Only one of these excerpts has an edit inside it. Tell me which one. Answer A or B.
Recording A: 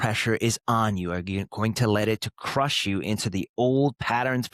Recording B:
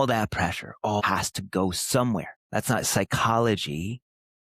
B